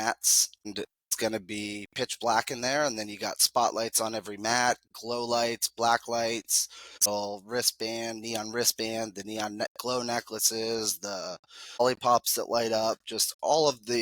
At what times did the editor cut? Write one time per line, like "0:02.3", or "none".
0:01.1
0:07.1
0:11.8